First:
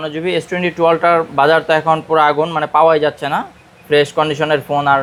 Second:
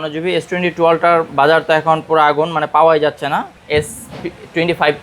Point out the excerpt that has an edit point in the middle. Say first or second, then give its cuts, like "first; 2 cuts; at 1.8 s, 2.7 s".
second; 1 cut; at 3.6 s